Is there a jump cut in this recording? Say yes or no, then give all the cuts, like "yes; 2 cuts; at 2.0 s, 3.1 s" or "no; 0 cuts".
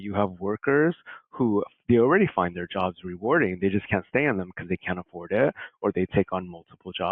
no; 0 cuts